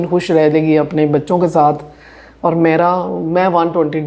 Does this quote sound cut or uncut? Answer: uncut